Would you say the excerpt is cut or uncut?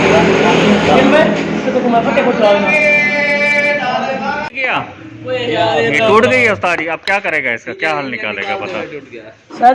cut